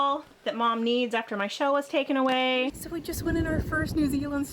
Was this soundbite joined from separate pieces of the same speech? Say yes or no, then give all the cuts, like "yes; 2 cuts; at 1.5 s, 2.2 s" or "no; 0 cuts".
yes; 1 cut; at 2.8 s